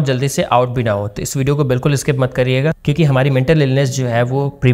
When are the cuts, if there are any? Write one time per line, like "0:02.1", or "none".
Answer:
0:02.8